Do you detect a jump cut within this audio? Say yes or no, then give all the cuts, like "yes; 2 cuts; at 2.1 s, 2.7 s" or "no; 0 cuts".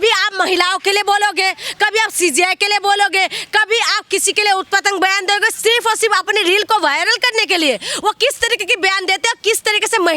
no; 0 cuts